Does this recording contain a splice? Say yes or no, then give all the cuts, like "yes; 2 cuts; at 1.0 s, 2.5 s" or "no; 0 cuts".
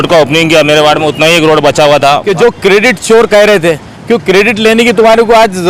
yes; 1 cut; at 2.3 s